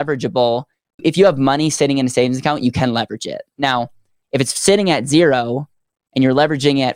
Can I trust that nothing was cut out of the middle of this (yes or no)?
no